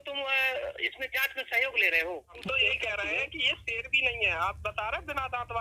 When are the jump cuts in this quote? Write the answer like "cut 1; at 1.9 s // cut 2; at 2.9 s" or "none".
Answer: cut 1; at 2.4 s